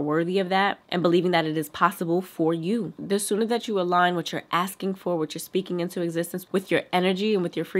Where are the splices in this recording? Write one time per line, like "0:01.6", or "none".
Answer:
none